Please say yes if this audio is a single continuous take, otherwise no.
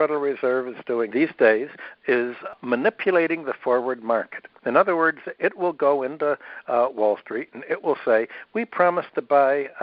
no